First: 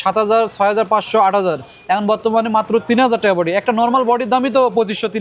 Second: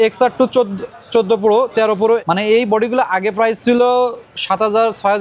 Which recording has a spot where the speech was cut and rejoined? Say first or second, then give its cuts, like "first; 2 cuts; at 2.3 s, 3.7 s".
second; 1 cut; at 2.2 s